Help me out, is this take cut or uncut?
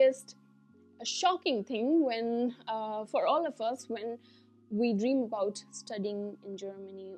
uncut